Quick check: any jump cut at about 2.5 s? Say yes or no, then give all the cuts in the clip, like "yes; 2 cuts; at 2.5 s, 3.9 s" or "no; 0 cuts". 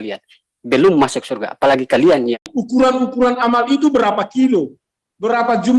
yes; 1 cut; at 2.5 s